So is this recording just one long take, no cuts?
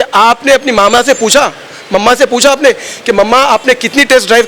yes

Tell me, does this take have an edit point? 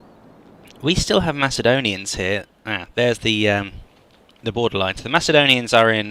no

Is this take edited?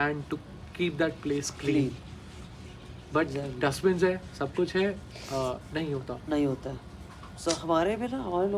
no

